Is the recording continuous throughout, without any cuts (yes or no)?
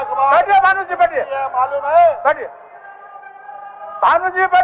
yes